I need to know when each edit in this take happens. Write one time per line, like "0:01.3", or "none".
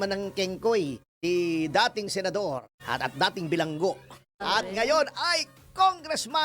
0:01.1
0:02.7
0:04.2